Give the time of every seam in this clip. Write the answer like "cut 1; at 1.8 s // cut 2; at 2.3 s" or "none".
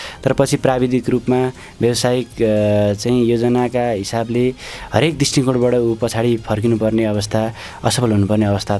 none